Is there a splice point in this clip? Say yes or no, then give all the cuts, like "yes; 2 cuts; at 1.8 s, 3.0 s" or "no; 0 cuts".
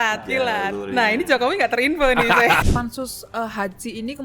yes; 1 cut; at 2.6 s